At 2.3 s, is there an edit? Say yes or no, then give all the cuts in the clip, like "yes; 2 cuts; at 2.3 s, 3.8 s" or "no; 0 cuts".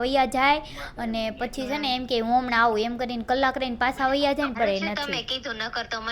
no; 1 cut; at 4.6 s